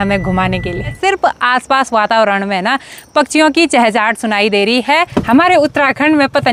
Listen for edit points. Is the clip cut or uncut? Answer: cut